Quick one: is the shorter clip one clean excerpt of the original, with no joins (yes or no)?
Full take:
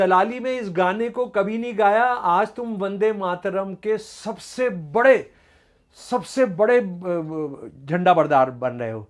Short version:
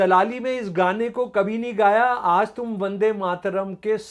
yes